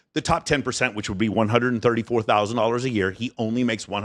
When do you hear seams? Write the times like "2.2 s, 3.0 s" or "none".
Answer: none